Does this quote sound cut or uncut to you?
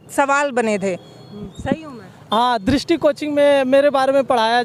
uncut